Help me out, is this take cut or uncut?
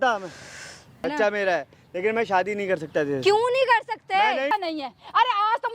cut